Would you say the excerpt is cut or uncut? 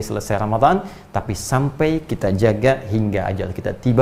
uncut